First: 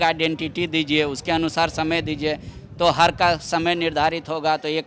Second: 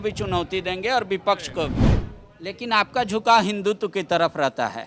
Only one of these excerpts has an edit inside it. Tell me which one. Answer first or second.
second